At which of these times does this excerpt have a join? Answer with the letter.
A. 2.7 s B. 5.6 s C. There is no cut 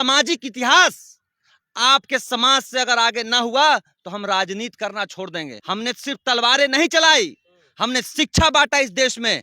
B